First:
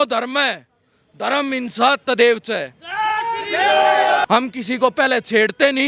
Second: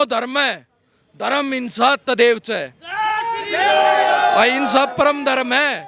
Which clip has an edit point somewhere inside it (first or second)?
first